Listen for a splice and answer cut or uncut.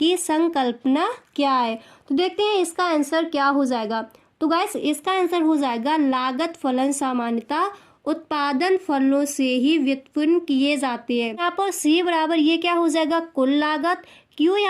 cut